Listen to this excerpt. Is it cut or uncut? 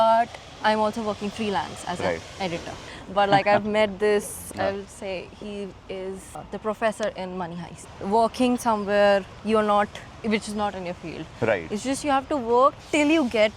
cut